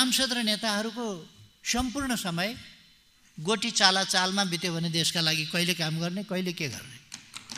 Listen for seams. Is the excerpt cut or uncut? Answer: uncut